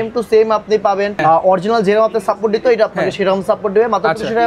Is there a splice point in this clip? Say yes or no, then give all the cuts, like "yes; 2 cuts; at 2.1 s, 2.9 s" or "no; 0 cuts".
yes; 1 cut; at 1.2 s